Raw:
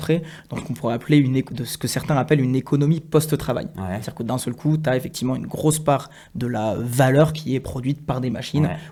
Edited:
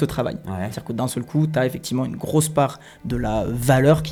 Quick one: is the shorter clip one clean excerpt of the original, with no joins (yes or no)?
yes